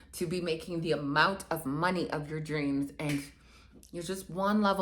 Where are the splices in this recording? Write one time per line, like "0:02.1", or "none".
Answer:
0:03.1